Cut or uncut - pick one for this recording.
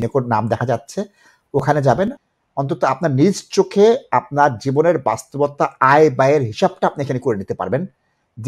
cut